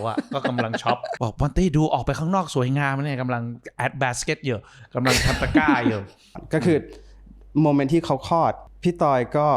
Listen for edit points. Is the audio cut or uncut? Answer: cut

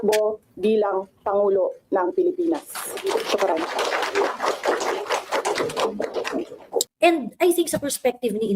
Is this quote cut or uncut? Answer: cut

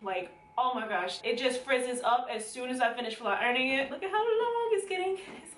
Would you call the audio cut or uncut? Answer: cut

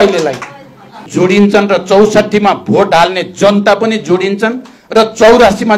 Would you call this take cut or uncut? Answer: cut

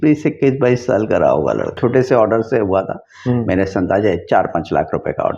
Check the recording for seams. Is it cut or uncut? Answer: cut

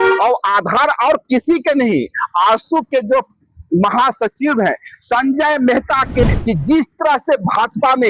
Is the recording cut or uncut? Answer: cut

